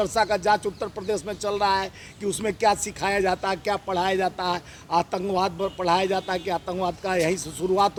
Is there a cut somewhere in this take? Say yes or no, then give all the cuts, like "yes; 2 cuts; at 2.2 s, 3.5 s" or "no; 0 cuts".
no; 0 cuts